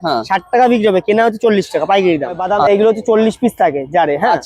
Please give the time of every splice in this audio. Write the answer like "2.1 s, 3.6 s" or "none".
2.5 s